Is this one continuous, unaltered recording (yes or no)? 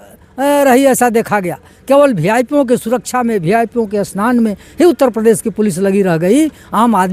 yes